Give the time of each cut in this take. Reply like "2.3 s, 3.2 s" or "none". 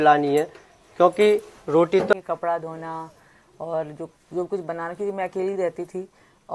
2.1 s